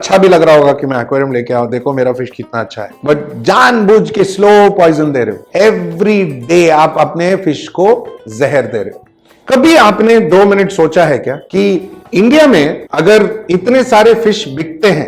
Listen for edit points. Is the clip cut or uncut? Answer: cut